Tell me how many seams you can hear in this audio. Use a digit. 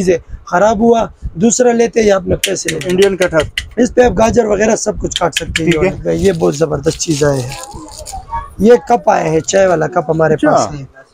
2